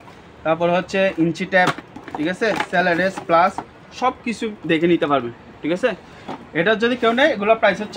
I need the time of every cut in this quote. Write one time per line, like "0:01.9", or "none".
none